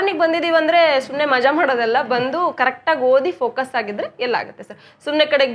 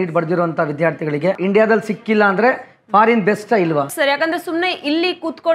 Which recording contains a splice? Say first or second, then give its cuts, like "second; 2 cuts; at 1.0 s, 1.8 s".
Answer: second; 2 cuts; at 1.4 s, 3.9 s